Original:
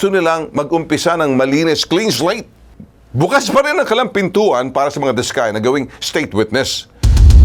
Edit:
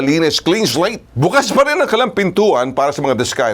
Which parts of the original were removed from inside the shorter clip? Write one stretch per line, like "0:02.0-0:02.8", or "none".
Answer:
0:02.5-0:03.0